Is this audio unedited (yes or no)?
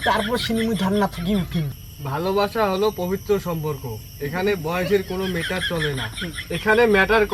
no